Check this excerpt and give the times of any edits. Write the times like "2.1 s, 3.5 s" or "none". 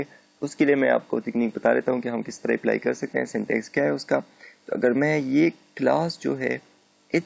none

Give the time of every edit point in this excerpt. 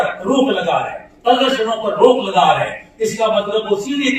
none

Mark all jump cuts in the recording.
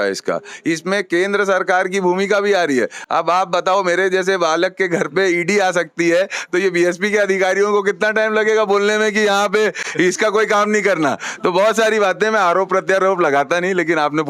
none

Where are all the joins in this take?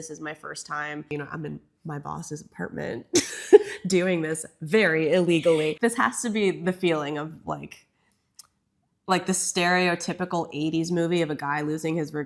1.1 s, 5.7 s

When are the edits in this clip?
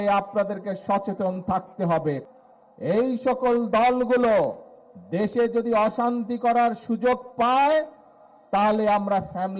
2.2 s

